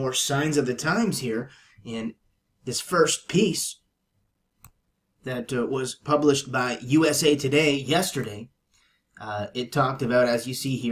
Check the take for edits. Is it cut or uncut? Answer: cut